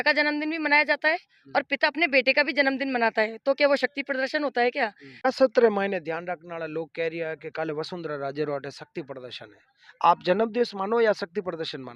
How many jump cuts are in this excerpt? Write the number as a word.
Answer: one